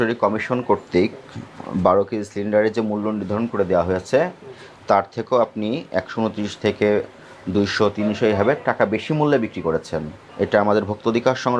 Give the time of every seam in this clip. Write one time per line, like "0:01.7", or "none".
none